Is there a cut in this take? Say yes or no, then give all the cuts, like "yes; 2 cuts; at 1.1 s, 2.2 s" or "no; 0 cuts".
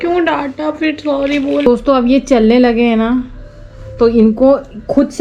yes; 1 cut; at 1.6 s